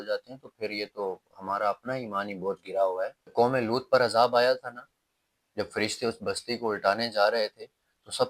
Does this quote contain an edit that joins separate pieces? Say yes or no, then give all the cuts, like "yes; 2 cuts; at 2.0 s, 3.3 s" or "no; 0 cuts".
yes; 1 cut; at 3.3 s